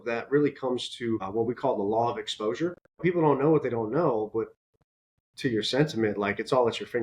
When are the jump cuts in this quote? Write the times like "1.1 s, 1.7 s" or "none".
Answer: 3.0 s